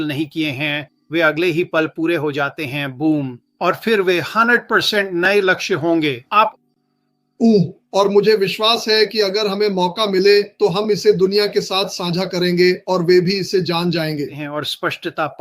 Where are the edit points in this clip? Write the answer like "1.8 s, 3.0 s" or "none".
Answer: 6.5 s, 14.4 s